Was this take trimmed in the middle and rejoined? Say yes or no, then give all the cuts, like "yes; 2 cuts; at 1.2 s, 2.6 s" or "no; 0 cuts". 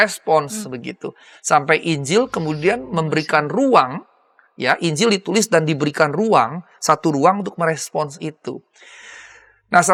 no; 0 cuts